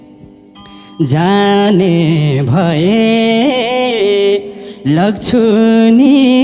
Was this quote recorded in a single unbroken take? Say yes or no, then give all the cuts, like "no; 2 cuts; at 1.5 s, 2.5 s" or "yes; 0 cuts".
yes; 0 cuts